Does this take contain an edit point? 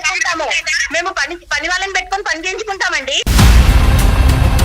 yes; 1 cut; at 3.2 s

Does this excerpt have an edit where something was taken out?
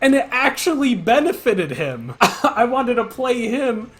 yes; 1 cut; at 2.0 s

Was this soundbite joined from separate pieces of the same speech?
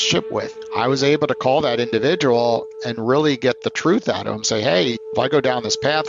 yes; 1 cut; at 5.0 s

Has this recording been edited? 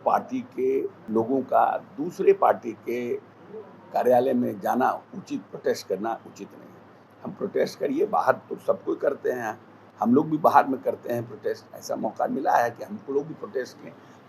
yes; 1 cut; at 1.0 s

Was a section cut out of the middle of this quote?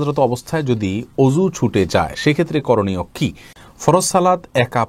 yes; 1 cut; at 3.6 s

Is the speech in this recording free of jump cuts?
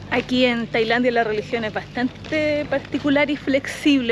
yes; 0 cuts

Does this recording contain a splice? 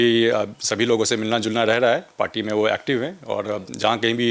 no; 0 cuts

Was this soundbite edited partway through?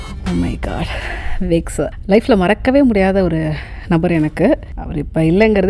yes; 2 cuts; at 2.0 s, 4.8 s

